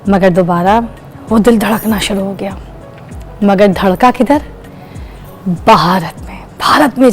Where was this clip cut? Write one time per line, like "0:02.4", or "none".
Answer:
none